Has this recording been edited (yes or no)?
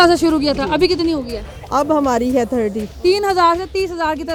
no